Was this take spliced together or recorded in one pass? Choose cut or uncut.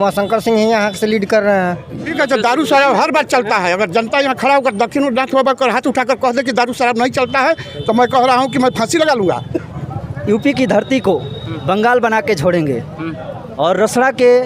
cut